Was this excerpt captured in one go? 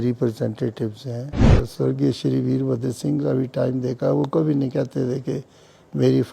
no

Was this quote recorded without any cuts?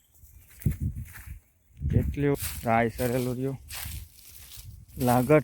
no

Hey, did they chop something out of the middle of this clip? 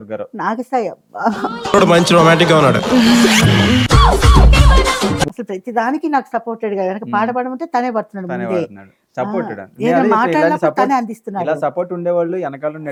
no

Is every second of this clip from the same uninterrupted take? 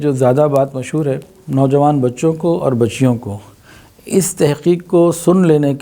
no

